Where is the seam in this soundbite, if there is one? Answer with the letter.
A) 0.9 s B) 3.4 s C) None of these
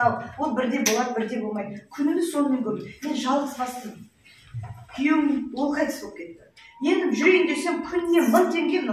C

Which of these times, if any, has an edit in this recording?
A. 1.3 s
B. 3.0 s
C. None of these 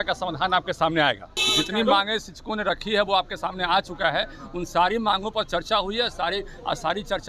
A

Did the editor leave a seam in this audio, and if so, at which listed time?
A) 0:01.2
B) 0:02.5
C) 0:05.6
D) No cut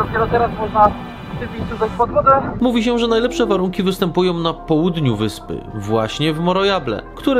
B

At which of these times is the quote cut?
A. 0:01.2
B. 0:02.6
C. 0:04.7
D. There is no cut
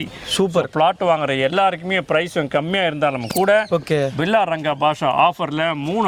D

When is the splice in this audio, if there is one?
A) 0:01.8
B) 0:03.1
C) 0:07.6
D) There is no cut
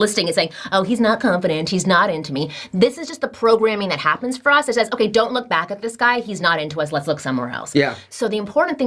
D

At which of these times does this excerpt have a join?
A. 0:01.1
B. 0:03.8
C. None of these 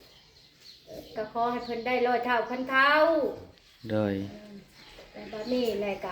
A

